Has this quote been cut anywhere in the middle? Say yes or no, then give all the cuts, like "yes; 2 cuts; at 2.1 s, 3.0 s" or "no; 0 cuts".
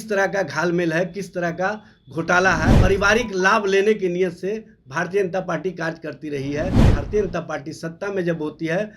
yes; 2 cuts; at 2.7 s, 6.8 s